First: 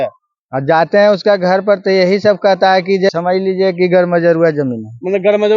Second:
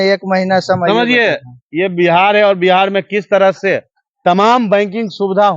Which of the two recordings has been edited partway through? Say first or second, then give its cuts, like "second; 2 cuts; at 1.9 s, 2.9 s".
first; 1 cut; at 3.1 s